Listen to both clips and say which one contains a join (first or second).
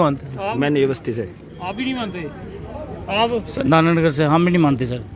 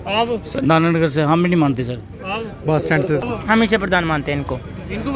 second